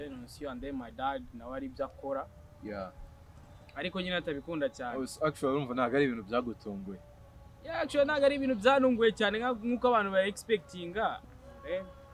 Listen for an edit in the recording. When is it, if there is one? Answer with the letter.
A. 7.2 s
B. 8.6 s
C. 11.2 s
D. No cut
C